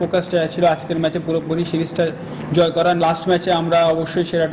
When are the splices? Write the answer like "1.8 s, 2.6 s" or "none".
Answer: 3.0 s